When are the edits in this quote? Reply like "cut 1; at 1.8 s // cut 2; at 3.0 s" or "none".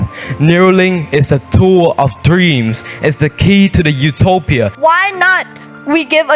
cut 1; at 4.7 s